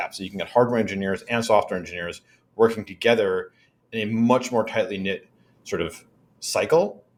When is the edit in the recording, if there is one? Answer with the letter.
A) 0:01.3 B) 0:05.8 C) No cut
C